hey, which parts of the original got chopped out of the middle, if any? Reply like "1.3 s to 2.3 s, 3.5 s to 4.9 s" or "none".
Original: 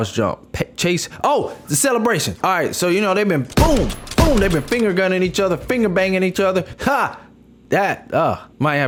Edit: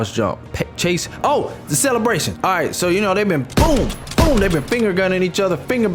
none